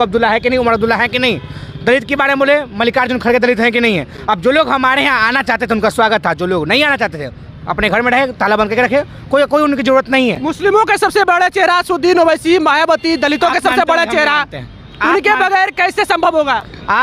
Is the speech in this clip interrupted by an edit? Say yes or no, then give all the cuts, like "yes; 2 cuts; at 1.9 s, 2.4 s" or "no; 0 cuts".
no; 0 cuts